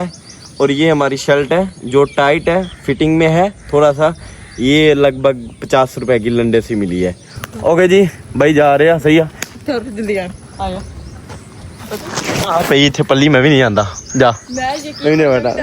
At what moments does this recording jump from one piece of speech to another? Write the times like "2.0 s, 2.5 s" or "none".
7.4 s